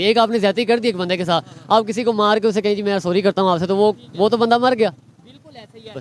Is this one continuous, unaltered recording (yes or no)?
yes